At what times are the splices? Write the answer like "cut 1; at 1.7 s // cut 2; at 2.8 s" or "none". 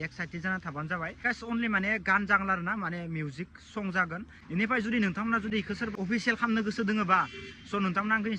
cut 1; at 1.2 s // cut 2; at 4.3 s // cut 3; at 5.9 s